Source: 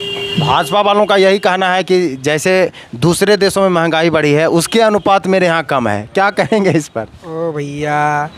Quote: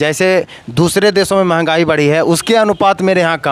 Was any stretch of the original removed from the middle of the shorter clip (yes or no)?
no